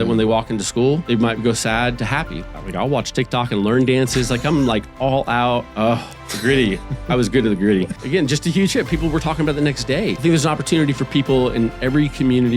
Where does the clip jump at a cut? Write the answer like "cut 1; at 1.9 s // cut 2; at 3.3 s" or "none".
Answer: cut 1; at 1.0 s // cut 2; at 2.4 s // cut 3; at 5.7 s // cut 4; at 8.0 s // cut 5; at 10.2 s